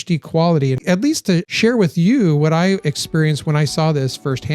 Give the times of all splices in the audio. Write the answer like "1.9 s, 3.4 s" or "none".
0.9 s